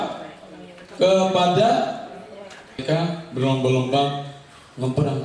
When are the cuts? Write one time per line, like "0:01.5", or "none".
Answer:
0:02.8